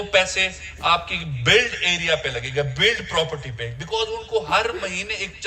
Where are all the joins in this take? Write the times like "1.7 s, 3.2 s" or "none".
none